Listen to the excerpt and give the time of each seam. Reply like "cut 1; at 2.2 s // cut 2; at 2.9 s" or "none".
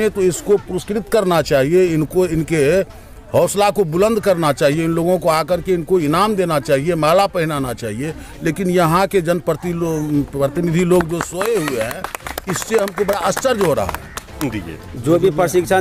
cut 1; at 14.5 s